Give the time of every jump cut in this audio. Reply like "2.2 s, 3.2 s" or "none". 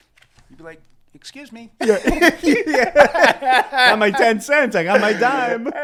none